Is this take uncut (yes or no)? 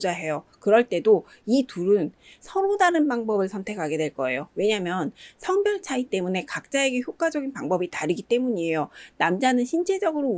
yes